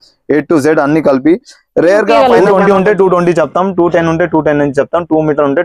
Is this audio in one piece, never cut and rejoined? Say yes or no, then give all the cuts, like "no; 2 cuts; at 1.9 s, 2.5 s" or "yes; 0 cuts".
no; 1 cut; at 2.2 s